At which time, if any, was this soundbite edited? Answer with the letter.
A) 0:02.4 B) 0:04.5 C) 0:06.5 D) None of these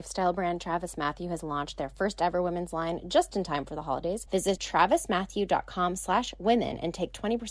B